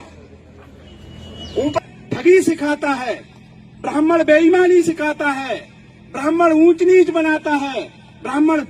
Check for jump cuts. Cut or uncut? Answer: cut